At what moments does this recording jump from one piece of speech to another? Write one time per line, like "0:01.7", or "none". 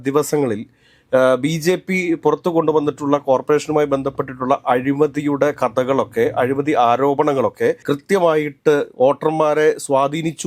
none